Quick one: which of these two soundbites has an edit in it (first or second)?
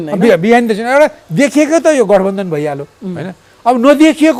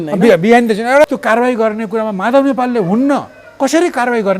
second